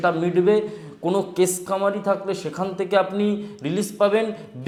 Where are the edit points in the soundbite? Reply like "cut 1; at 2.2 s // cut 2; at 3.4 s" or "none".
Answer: none